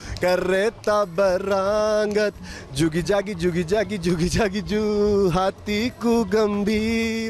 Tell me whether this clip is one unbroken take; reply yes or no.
yes